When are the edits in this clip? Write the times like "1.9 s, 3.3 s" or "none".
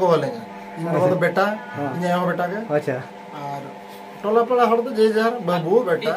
none